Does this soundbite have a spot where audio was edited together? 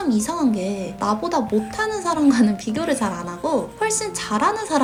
no; 0 cuts

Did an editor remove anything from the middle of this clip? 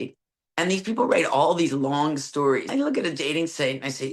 yes; 1 cut; at 2.7 s

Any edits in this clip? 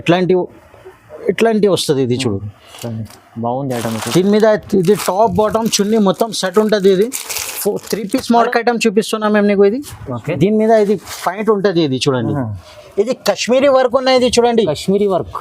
yes; 1 cut; at 8.5 s

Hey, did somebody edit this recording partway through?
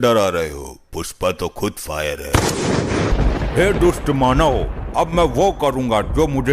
yes; 1 cut; at 3.1 s

